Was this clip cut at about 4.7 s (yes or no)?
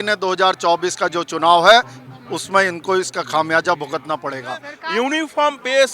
yes